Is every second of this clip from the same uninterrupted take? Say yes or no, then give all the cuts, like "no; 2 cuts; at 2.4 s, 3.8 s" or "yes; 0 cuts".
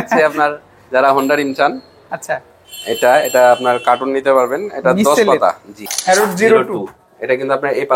no; 1 cut; at 5.9 s